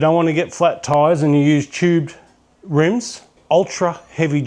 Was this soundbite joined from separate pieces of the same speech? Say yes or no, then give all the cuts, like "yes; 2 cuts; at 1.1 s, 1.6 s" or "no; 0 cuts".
yes; 1 cut; at 3.3 s